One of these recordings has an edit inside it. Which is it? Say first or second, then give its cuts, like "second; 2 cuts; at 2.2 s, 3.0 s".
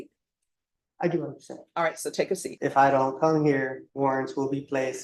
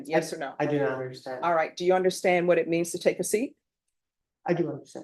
first; 2 cuts; at 2.5 s, 3.8 s